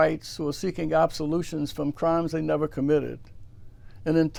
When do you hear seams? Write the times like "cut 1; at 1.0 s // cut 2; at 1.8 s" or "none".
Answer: none